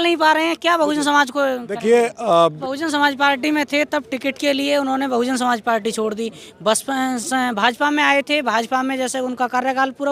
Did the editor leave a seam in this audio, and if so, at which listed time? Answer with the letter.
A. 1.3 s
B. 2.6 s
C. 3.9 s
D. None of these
B